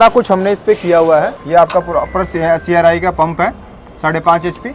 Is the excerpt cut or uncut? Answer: cut